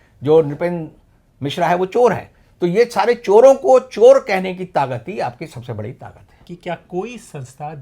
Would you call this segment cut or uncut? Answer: cut